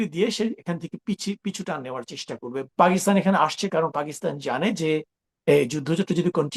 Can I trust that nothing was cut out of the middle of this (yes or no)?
no